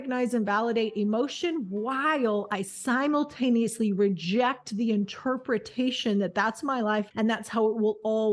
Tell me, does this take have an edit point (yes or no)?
yes